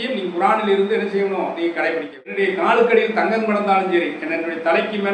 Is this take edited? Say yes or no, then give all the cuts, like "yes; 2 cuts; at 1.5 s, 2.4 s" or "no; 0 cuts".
yes; 1 cut; at 2.3 s